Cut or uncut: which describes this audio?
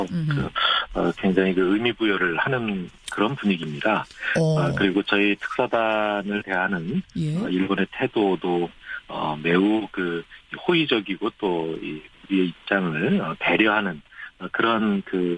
uncut